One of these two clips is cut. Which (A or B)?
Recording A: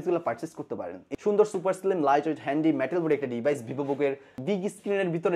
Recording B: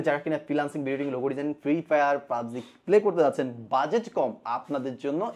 A